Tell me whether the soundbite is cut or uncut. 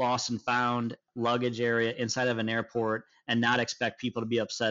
cut